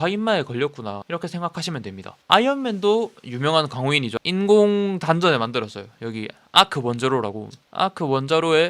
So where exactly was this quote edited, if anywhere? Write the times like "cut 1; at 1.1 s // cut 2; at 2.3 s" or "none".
cut 1; at 2.1 s // cut 2; at 4.1 s